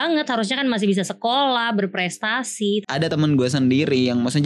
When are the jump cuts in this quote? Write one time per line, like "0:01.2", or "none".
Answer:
0:03.1